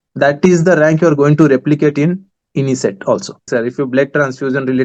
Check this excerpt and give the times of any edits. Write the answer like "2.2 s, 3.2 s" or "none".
3.5 s